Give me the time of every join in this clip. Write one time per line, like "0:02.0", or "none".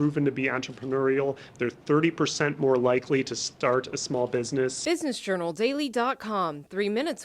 0:04.8